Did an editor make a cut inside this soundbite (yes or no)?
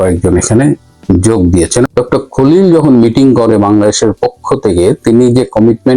yes